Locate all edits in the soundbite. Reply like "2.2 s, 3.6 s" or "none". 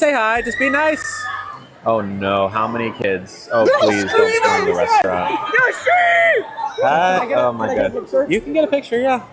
none